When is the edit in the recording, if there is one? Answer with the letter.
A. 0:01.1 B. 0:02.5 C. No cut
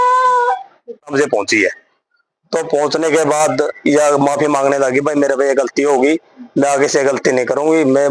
A